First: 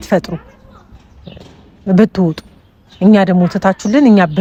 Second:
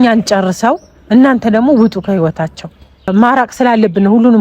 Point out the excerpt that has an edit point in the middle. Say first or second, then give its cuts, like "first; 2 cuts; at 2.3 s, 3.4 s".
second; 1 cut; at 3.1 s